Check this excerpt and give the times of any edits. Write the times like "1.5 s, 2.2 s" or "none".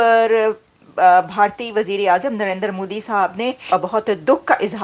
3.6 s